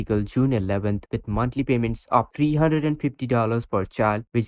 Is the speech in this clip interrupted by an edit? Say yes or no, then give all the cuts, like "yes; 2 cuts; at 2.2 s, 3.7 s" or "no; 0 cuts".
yes; 1 cut; at 1.0 s